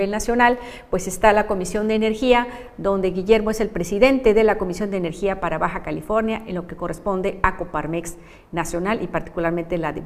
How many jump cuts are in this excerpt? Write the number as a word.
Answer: one